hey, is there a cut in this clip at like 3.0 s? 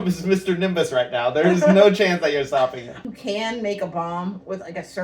yes; 1 cut; at 3.0 s

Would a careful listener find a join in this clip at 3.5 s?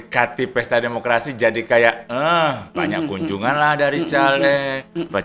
no; 0 cuts

